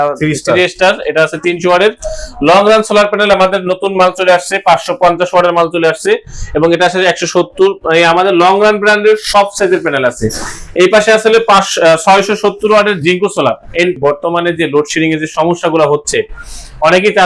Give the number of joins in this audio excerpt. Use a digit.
1